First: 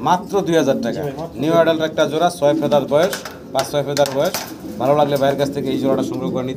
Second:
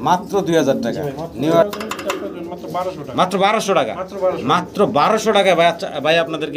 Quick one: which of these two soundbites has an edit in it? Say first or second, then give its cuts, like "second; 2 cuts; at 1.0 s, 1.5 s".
second; 1 cut; at 1.6 s